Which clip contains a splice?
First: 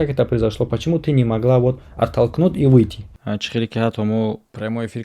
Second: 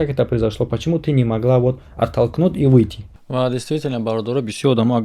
first; 1 cut; at 3.2 s

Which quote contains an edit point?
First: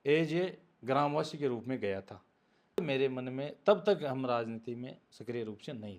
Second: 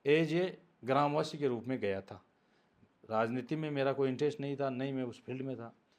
first; 1 cut; at 2.8 s

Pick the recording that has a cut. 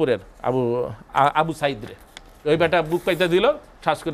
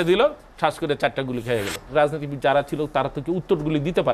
second; 1 cut; at 1.9 s

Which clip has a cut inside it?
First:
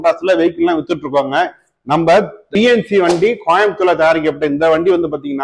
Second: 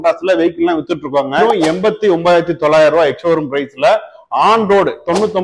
second; 1 cut; at 1.4 s

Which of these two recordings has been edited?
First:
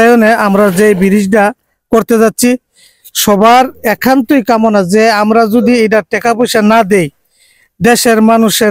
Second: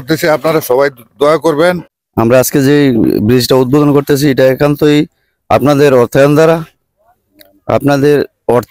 second; 1 cut; at 1.9 s

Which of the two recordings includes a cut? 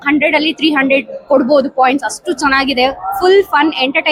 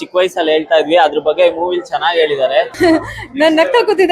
second; 1 cut; at 2.7 s

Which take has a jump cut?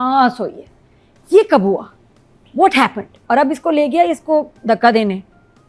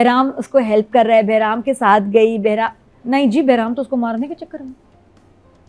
first; 1 cut; at 3.1 s

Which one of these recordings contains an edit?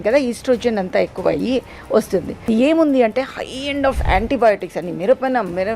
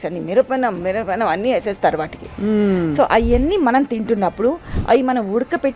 first; 1 cut; at 2.5 s

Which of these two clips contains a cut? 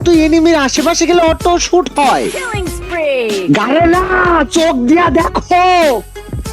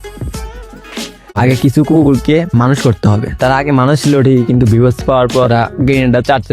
second; 1 cut; at 1.4 s

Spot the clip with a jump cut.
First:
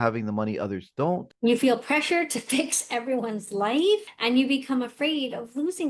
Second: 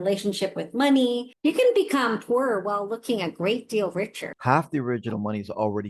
second; 2 cuts; at 1.3 s, 4.3 s

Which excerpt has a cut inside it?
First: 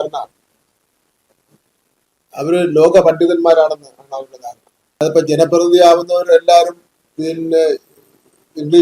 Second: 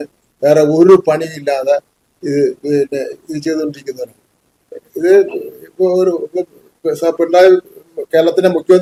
first; 1 cut; at 5.0 s

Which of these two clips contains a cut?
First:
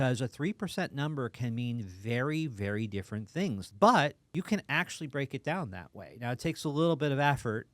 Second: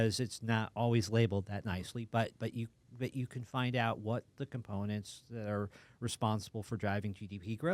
first; 2 cuts; at 3.7 s, 4.2 s

